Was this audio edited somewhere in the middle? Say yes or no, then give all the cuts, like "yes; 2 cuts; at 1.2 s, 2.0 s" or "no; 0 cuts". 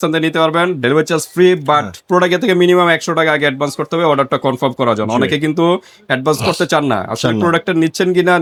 no; 0 cuts